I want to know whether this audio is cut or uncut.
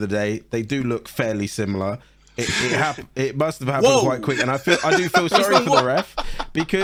uncut